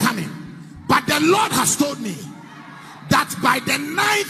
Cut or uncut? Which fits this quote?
uncut